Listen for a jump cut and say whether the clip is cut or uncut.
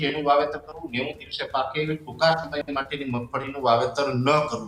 uncut